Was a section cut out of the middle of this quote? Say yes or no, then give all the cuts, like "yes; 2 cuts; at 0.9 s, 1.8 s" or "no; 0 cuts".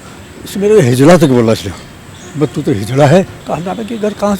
yes; 1 cut; at 3.4 s